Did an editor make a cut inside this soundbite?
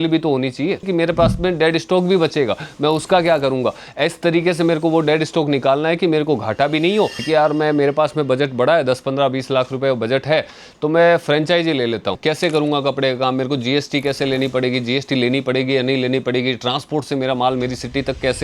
yes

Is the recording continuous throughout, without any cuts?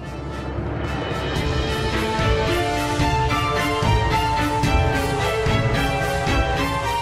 yes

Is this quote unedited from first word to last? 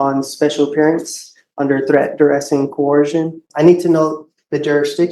no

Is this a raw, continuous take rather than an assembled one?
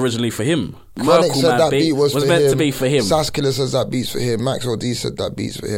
no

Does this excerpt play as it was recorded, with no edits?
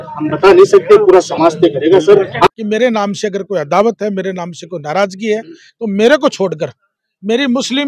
no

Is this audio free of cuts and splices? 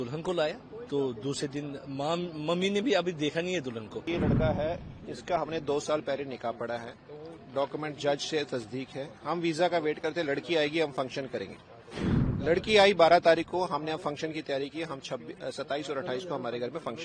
no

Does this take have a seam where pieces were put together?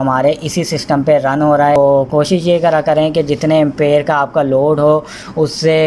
yes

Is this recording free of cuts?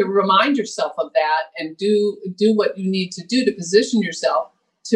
yes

